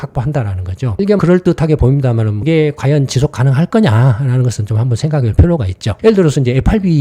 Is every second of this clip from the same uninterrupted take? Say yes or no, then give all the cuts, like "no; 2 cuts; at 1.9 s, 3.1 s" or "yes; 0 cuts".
no; 2 cuts; at 2.3 s, 5.9 s